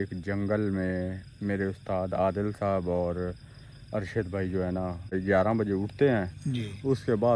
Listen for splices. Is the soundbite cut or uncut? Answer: cut